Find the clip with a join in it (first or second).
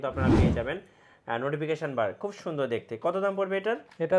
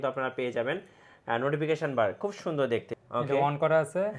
second